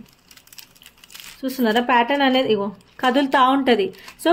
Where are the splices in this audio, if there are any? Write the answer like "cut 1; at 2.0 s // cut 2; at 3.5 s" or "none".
none